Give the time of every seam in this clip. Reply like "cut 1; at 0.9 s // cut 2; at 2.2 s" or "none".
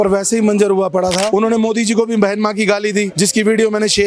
cut 1; at 1.3 s // cut 2; at 3.1 s